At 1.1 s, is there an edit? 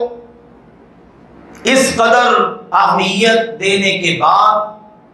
no; 0 cuts

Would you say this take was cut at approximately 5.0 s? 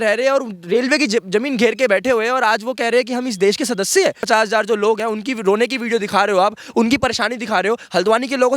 yes; 2 cuts; at 4.2 s, 5.0 s

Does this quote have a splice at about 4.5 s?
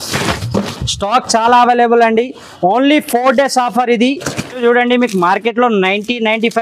yes; 1 cut; at 4.5 s

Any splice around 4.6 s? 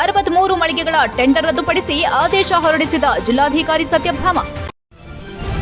yes; 1 cut; at 4.6 s

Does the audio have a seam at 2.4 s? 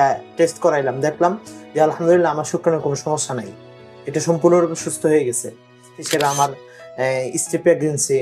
no; 1 cut; at 6.0 s

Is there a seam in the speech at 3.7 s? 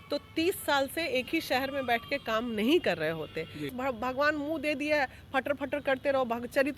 yes; 1 cut; at 3.7 s

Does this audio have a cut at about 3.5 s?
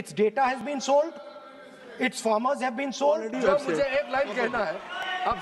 yes; 1 cut; at 3.5 s

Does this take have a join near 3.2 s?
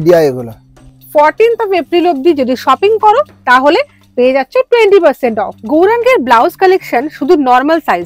no; 2 cuts; at 1.0 s, 5.5 s

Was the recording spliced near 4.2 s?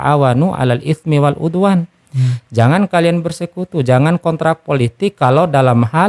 no; 0 cuts

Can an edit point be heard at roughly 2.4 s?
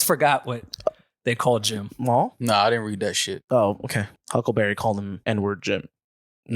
yes; 3 cuts; at 2.4 s, 4.1 s, 5.2 s

